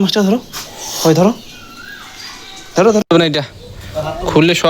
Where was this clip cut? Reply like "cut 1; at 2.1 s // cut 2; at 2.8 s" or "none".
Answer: cut 1; at 3.0 s